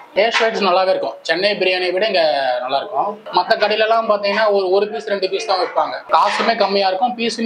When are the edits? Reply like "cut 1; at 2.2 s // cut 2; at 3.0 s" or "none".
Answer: cut 1; at 3.2 s